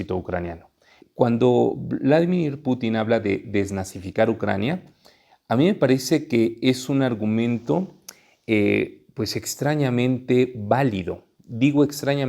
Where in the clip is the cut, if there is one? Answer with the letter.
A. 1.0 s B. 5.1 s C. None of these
A